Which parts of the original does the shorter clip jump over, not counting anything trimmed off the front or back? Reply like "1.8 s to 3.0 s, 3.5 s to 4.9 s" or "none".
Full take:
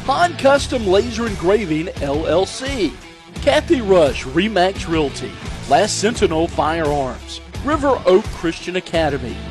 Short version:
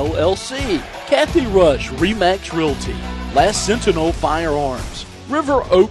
3.0 s to 3.3 s